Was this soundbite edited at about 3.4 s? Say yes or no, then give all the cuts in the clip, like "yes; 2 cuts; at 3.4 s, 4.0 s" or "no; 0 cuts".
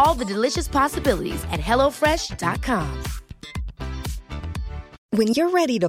no; 1 cut; at 4.9 s